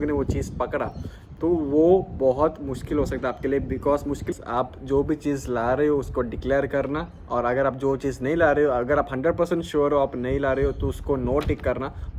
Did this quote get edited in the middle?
yes; 1 cut; at 4.3 s

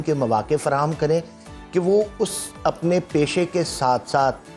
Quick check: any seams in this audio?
no; 0 cuts

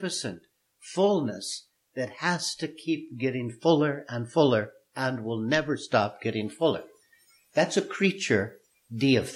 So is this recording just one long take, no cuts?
yes; 0 cuts

